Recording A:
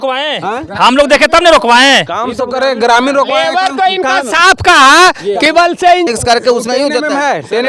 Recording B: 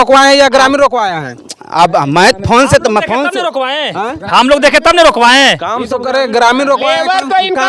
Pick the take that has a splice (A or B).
A